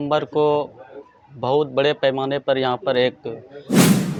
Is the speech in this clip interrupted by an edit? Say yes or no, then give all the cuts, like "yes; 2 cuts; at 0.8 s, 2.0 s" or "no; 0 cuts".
no; 0 cuts